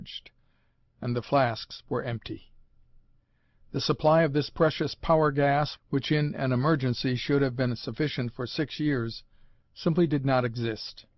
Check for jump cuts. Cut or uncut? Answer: cut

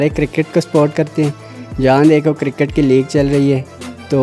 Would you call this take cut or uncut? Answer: uncut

